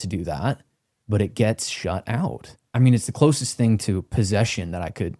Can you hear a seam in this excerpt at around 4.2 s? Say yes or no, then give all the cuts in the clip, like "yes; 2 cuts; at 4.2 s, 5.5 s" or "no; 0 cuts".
no; 1 cut; at 2.6 s